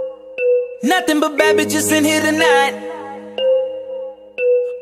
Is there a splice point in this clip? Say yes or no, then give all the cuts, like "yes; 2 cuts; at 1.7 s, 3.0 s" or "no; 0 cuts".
no; 0 cuts